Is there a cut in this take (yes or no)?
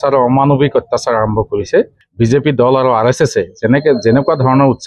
yes